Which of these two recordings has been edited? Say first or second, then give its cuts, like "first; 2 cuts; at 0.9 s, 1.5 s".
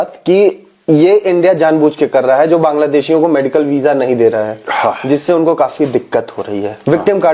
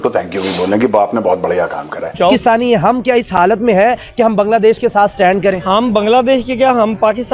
second; 1 cut; at 2.1 s